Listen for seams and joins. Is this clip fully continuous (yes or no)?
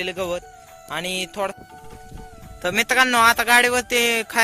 no